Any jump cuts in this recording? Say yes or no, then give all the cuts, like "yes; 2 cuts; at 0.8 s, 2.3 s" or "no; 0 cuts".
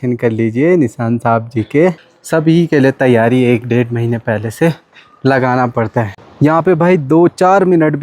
yes; 2 cuts; at 2.1 s, 6.3 s